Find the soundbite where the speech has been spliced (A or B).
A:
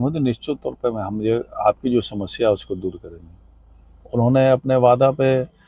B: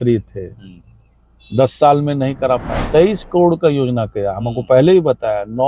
B